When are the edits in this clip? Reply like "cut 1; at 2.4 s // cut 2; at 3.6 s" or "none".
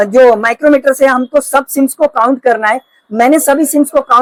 none